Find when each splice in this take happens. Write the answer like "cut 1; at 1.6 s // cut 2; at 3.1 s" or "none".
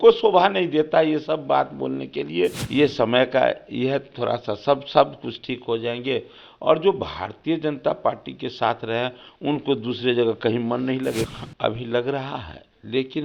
cut 1; at 2.6 s // cut 2; at 11.3 s